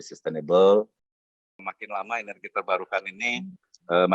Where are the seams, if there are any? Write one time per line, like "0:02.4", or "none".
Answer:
0:01.6